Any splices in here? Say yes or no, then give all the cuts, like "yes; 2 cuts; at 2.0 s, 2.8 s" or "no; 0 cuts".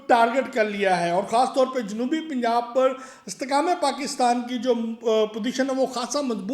no; 0 cuts